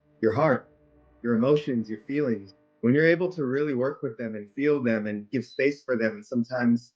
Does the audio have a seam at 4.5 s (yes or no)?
no